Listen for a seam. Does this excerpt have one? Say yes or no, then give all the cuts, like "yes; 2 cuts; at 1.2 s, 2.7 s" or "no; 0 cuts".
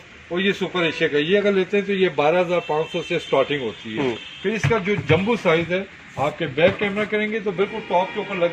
no; 0 cuts